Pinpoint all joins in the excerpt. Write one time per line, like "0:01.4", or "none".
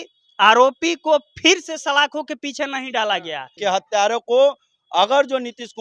0:03.4